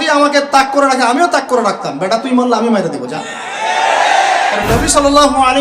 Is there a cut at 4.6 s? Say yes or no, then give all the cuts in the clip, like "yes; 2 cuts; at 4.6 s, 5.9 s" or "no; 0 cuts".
yes; 1 cut; at 4.6 s